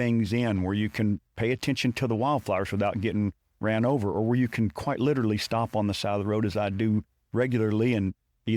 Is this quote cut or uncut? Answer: uncut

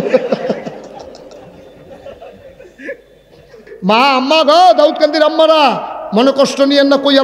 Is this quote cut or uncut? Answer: cut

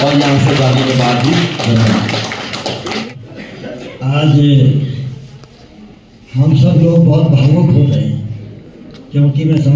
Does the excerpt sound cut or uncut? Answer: uncut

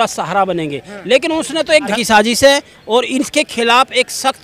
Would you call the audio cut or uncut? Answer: cut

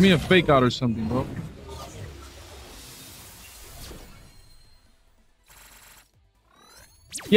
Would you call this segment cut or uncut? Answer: uncut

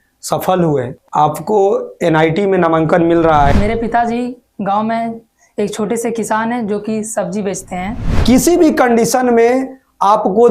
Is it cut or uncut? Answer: cut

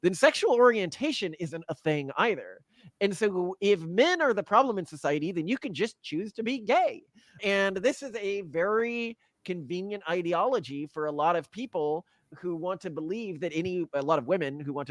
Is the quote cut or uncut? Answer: uncut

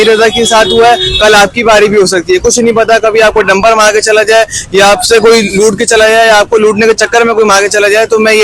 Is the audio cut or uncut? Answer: uncut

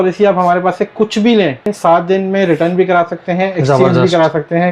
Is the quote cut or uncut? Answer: cut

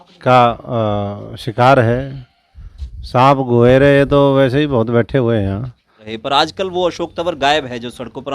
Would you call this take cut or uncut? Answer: cut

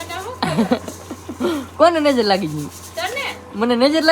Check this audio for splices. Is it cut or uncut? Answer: uncut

